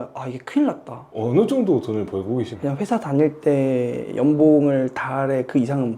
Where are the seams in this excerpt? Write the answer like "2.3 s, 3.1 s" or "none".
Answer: 1.1 s, 2.5 s